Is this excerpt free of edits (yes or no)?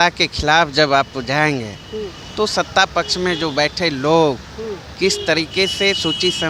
yes